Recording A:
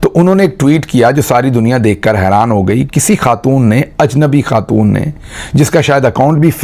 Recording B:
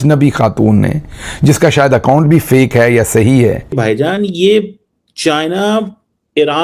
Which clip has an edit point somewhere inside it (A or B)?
B